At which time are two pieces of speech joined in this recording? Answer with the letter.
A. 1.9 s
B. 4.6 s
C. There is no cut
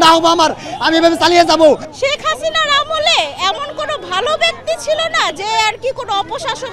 A